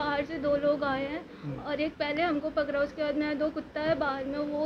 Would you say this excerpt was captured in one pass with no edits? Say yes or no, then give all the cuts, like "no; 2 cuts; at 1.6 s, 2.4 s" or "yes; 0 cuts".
yes; 0 cuts